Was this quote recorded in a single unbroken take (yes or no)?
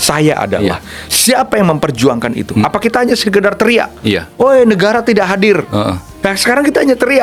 yes